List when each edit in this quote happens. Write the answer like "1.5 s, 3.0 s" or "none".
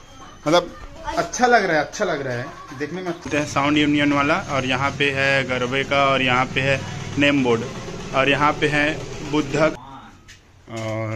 3.2 s, 9.7 s